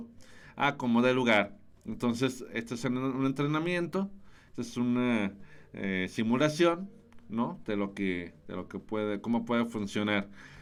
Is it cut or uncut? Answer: uncut